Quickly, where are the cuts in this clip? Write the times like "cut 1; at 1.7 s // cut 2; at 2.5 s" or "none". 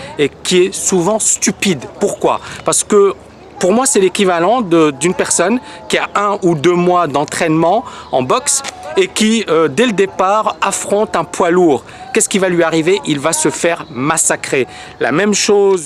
none